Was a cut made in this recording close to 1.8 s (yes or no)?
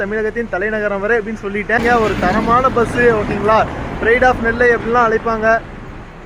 yes